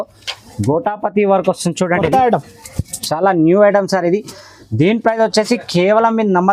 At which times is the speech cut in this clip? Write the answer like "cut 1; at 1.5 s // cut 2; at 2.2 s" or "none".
none